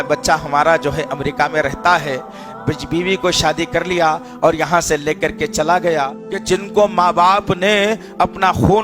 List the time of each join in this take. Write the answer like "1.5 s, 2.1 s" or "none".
6.2 s